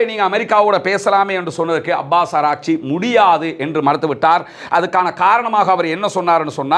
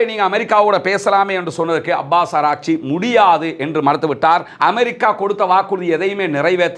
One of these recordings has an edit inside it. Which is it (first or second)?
second